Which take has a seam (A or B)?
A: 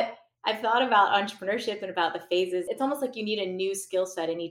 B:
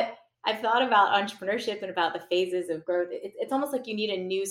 A